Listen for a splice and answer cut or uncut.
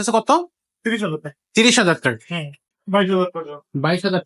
cut